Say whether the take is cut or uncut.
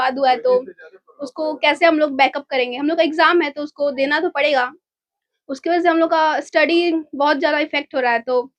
uncut